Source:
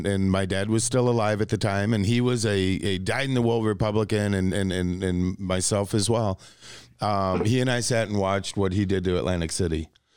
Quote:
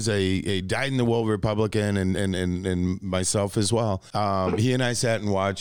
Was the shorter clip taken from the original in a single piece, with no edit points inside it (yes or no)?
no